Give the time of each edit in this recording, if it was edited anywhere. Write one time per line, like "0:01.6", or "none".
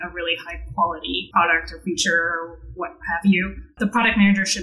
0:01.2
0:03.7